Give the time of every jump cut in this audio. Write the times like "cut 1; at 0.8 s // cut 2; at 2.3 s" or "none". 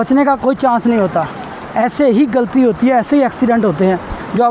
none